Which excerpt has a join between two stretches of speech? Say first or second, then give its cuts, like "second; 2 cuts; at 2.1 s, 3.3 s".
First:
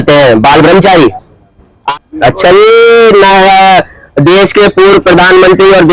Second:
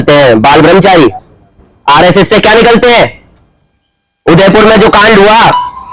first; 1 cut; at 1.8 s